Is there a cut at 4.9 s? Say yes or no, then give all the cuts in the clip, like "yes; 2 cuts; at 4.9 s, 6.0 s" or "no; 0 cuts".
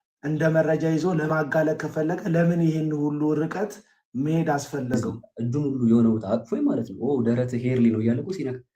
yes; 1 cut; at 4.9 s